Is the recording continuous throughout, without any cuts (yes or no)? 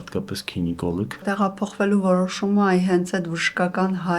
no